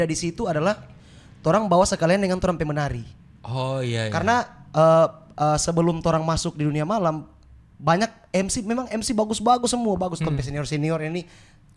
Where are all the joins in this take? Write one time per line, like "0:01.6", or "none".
none